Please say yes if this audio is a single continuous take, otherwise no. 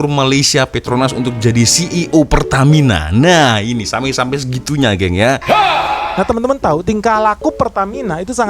no